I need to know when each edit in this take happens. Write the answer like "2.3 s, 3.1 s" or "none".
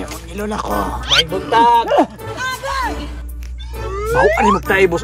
none